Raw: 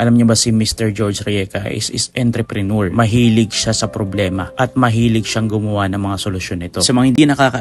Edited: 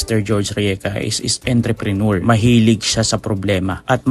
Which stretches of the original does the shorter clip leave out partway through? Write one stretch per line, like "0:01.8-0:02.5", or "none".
none